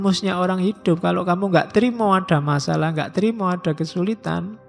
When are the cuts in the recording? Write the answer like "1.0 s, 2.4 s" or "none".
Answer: none